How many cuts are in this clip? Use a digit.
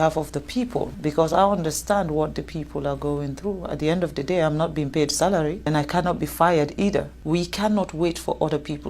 3